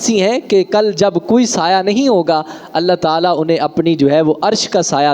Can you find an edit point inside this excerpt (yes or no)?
no